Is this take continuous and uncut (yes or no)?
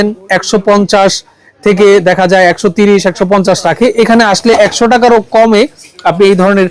yes